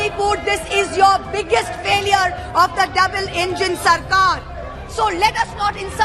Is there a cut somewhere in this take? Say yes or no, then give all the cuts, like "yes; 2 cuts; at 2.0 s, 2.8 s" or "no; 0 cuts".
no; 0 cuts